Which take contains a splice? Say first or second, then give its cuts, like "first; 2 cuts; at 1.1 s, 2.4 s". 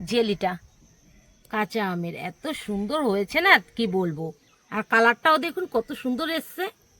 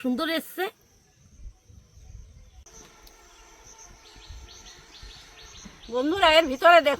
second; 1 cut; at 2.7 s